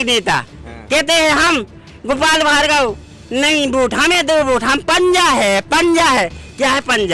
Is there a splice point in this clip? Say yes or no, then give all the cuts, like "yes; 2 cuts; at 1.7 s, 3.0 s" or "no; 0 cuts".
no; 0 cuts